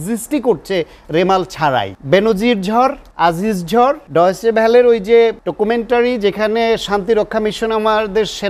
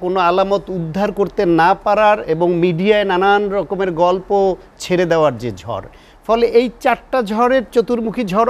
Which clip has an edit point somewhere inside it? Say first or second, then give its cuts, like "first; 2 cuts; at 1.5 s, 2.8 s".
first; 4 cuts; at 2.0 s, 3.1 s, 4.0 s, 5.4 s